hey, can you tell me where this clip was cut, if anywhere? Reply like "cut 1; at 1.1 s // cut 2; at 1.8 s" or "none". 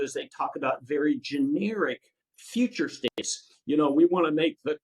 none